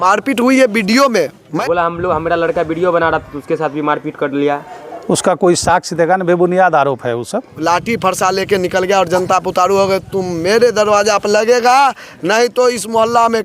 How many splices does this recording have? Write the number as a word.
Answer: two